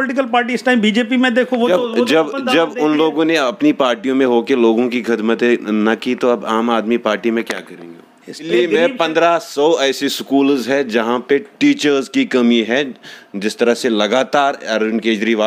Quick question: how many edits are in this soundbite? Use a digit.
1